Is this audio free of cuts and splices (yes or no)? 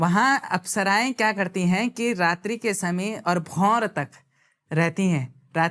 yes